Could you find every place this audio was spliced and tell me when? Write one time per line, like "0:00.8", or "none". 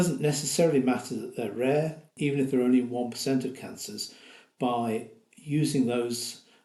none